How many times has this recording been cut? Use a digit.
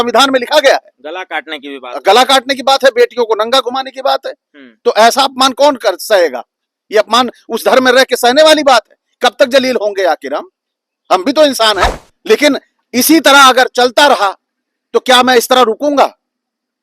1